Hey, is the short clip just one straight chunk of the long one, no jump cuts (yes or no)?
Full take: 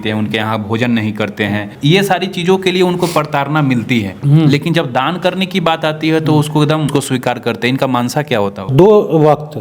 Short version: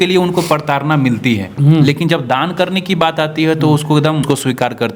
yes